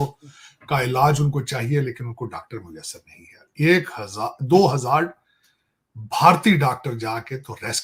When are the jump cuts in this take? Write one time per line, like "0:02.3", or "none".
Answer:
none